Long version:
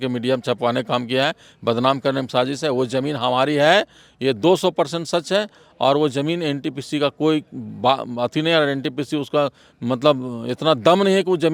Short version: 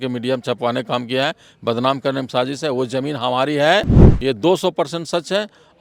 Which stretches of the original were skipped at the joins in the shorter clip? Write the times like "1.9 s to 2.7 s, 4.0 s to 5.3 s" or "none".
none